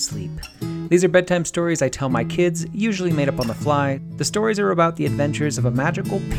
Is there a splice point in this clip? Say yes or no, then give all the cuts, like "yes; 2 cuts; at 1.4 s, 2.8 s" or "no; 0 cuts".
yes; 1 cut; at 4.1 s